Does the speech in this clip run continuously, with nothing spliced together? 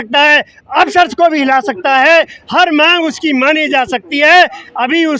yes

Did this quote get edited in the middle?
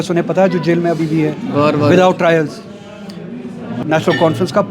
yes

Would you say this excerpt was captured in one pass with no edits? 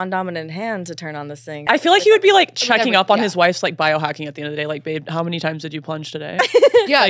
no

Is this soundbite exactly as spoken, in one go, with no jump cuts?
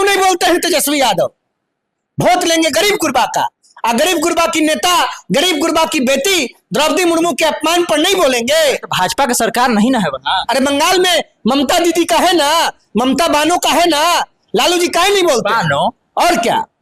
yes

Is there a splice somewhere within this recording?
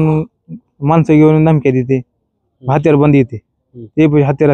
no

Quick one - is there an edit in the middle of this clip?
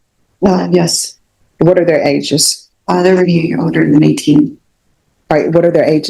yes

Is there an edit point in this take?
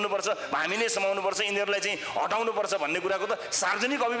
no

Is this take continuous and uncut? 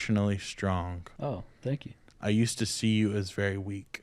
no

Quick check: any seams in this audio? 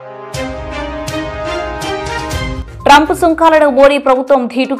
yes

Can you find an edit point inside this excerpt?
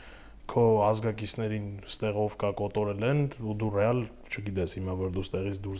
no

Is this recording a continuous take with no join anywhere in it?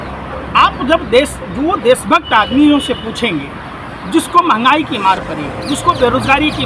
yes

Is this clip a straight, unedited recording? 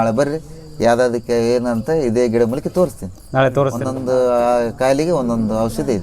no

